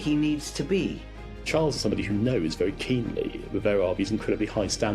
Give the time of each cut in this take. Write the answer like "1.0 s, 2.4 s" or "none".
1.5 s